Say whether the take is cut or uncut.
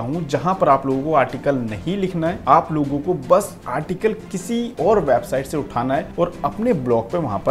cut